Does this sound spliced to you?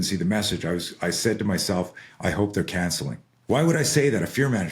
yes; 1 cut; at 3.3 s

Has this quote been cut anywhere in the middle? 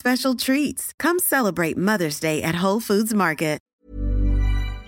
yes; 1 cut; at 3.6 s

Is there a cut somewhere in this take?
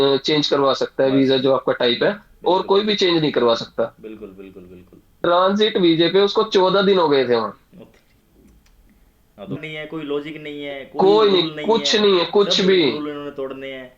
yes; 2 cuts; at 5.2 s, 9.5 s

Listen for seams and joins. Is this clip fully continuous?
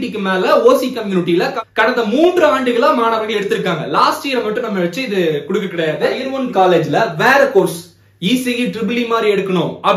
no; 1 cut; at 6.2 s

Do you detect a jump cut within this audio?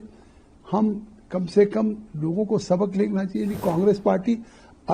yes; 1 cut; at 3.6 s

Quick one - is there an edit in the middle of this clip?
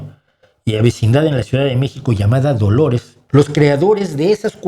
yes; 1 cut; at 3.1 s

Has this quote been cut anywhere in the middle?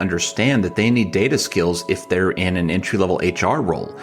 no; 0 cuts

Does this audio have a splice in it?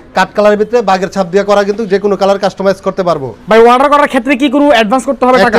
yes; 1 cut; at 3.3 s

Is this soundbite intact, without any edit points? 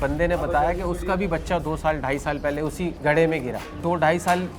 no; 2 cuts; at 3.0 s, 3.7 s

